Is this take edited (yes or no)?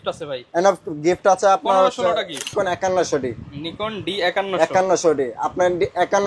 yes